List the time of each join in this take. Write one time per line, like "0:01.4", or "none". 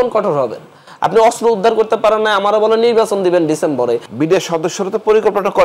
0:04.1